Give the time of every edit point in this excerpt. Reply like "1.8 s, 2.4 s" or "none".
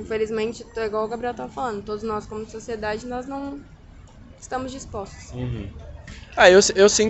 none